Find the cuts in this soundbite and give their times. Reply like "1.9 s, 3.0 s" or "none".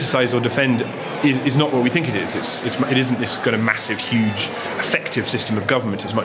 1.0 s, 4.6 s